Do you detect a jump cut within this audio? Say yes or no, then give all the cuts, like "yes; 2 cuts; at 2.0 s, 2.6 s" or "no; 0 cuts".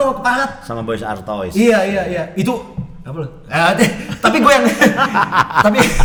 no; 0 cuts